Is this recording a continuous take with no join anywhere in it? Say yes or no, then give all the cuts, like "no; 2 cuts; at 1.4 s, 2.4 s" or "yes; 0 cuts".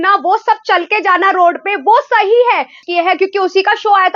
no; 1 cut; at 2.8 s